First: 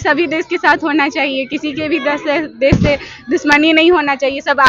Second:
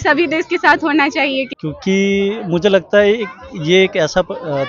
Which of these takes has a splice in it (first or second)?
second